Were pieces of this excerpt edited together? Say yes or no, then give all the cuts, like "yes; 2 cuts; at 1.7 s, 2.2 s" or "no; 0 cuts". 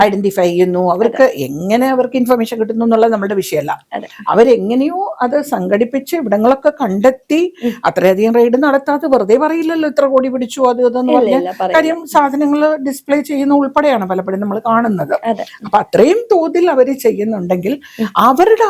no; 0 cuts